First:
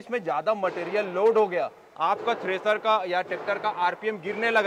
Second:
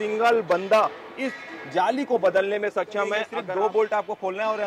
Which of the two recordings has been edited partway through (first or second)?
second